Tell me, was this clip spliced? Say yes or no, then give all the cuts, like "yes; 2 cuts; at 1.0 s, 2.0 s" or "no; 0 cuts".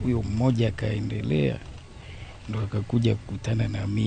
no; 0 cuts